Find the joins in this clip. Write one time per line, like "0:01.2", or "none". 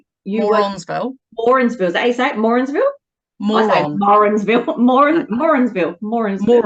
none